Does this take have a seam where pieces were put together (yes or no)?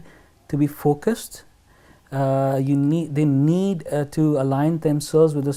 no